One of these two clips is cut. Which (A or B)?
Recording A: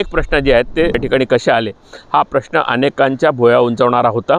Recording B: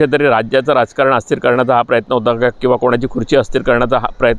A